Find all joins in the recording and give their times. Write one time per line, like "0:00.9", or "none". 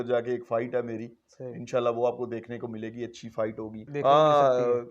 0:03.8